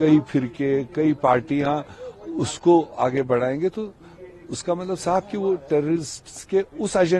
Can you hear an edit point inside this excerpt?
no; 0 cuts

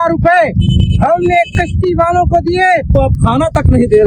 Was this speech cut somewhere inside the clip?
yes; 1 cut; at 2.9 s

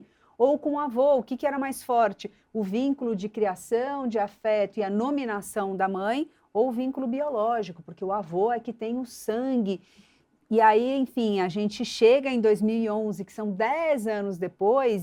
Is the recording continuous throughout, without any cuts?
yes; 0 cuts

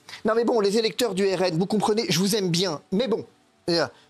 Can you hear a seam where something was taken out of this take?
no; 0 cuts

